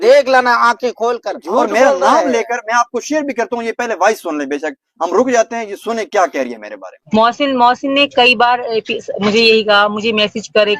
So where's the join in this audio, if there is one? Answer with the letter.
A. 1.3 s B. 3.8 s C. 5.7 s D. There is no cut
A